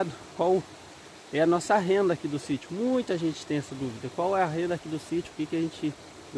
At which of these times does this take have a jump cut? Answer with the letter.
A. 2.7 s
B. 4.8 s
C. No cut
C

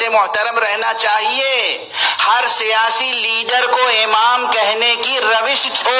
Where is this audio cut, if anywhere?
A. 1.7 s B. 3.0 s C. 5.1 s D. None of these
D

